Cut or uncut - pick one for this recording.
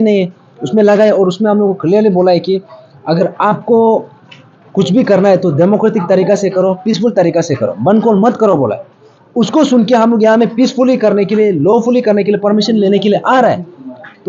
uncut